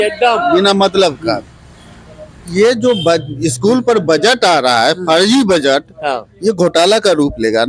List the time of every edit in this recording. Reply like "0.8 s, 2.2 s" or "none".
2.5 s